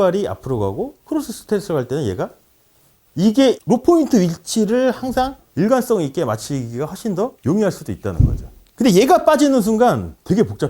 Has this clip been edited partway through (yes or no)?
no